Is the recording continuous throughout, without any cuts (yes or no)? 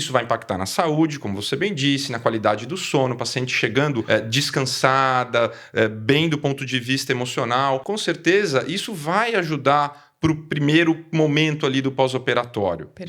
no